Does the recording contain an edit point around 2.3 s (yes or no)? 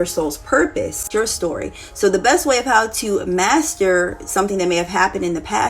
no